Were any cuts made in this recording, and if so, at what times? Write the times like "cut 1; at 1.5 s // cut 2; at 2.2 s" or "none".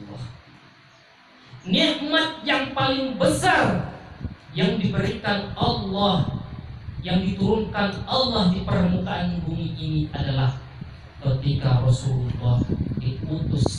none